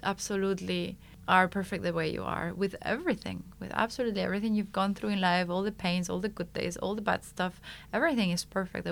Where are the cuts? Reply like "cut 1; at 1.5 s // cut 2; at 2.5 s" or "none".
cut 1; at 1.1 s